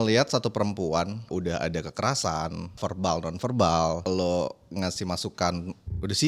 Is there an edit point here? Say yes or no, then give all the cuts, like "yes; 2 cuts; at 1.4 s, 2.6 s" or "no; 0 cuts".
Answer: yes; 3 cuts; at 1.3 s, 2.8 s, 4.0 s